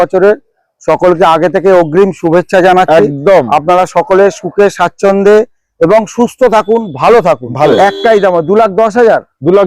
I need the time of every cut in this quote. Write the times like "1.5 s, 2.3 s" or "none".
7.7 s